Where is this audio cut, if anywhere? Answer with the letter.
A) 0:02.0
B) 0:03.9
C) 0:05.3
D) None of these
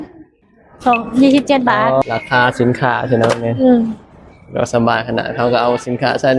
A